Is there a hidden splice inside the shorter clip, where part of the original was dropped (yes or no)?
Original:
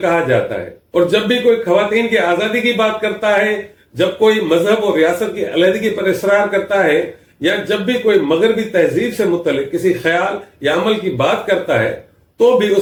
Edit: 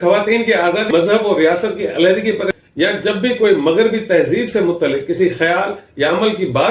yes